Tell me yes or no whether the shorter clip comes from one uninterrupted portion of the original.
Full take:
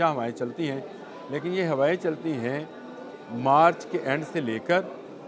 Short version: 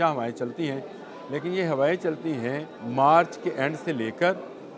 no